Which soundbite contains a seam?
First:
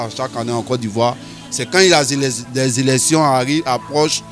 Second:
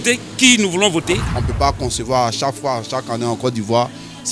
second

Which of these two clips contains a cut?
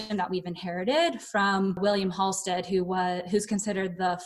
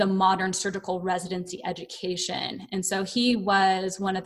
first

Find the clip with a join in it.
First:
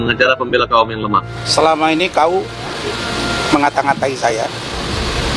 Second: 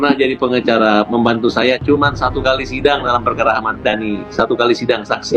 first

